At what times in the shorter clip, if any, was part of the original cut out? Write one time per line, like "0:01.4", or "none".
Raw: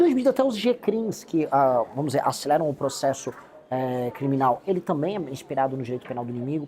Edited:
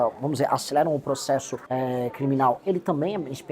0:01.6